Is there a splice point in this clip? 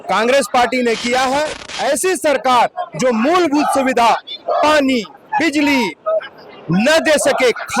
yes; 1 cut; at 1.6 s

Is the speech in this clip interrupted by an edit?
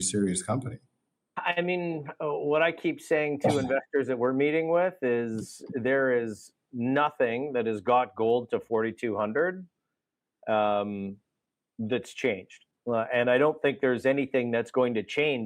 yes; 1 cut; at 1.3 s

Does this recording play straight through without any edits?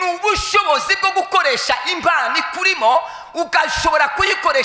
yes; 0 cuts

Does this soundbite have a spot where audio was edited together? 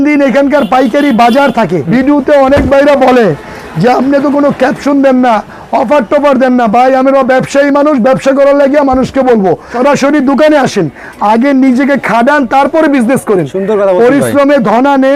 yes; 2 cuts; at 1.8 s, 9.7 s

